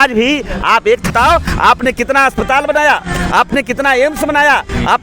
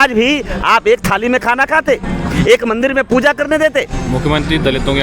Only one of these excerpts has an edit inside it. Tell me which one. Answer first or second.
first